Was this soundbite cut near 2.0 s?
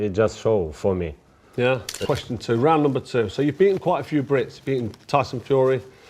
yes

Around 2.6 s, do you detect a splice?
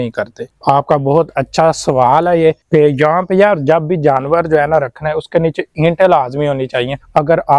yes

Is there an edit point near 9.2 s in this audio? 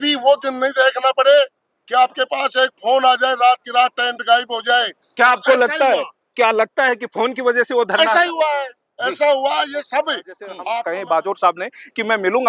no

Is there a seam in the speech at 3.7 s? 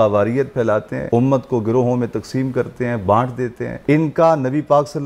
yes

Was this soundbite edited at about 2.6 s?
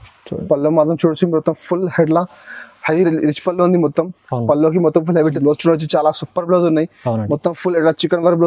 no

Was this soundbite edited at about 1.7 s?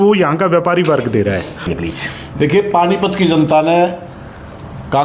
yes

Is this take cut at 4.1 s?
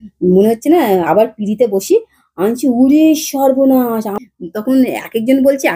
yes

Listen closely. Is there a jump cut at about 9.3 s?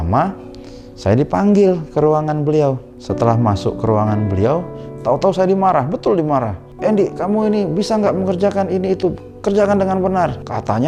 no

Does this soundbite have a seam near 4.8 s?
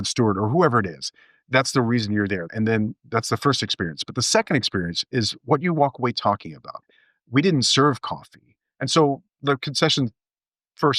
no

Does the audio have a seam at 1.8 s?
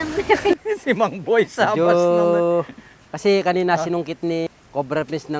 no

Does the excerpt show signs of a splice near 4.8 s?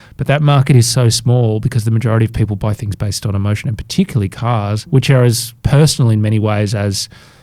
yes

